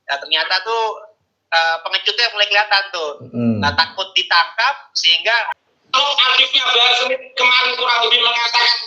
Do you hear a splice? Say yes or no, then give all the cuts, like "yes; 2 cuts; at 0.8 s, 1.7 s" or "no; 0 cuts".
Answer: yes; 1 cut; at 5.5 s